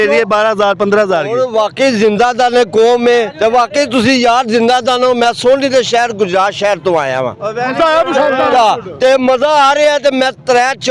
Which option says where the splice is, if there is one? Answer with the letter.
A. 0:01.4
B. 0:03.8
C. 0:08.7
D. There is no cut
A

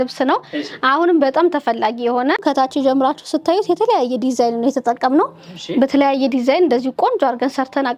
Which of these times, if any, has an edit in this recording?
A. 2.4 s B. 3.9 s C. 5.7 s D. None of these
A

